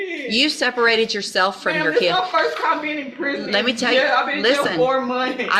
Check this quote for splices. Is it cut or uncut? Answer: uncut